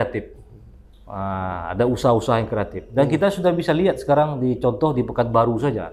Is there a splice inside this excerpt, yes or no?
no